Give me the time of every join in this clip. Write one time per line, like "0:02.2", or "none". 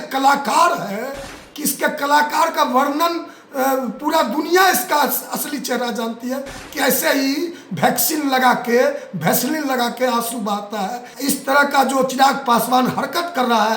0:11.1